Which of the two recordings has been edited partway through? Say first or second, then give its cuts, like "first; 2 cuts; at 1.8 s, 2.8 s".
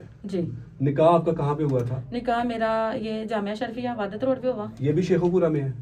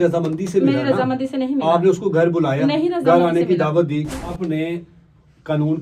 second; 1 cut; at 4.2 s